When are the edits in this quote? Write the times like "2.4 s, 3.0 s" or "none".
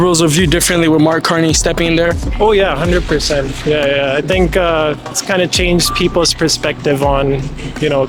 none